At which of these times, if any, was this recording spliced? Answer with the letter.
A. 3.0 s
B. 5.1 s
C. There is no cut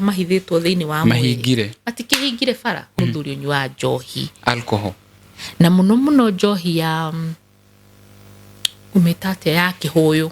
A